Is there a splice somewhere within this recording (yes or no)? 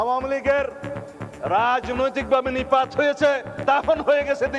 yes